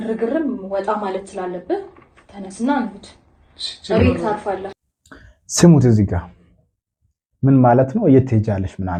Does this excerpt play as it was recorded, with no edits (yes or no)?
yes